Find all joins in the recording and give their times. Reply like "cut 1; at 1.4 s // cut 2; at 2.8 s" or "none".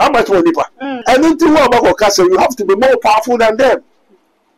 cut 1; at 1.0 s